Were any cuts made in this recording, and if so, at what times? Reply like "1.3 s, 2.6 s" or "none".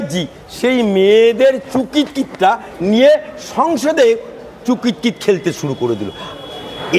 none